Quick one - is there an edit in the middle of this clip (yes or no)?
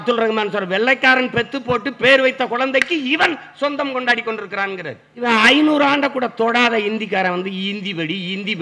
yes